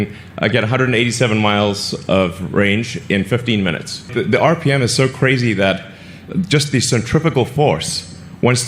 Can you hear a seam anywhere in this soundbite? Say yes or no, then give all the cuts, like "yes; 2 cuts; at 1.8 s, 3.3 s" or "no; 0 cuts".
yes; 1 cut; at 4.0 s